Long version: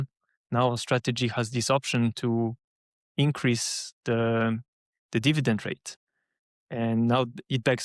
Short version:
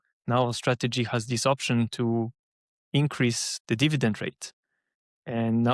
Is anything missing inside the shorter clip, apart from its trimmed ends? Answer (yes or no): yes